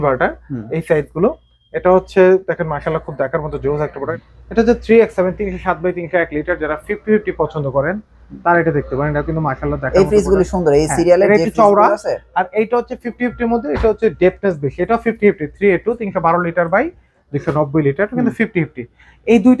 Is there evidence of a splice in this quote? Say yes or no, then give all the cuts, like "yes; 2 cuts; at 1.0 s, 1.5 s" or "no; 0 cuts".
yes; 1 cut; at 4.1 s